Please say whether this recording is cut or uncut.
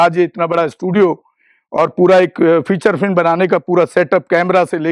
uncut